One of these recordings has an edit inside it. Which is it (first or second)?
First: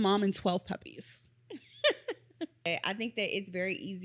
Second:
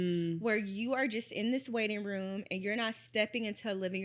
first